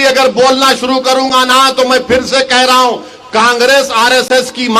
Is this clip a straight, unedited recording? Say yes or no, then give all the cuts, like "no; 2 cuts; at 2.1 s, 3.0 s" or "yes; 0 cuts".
yes; 0 cuts